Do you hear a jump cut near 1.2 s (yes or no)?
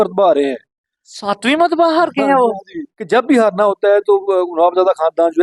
no